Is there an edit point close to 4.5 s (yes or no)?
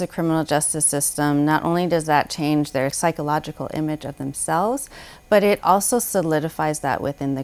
no